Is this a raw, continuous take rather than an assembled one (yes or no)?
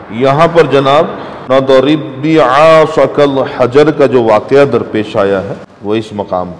no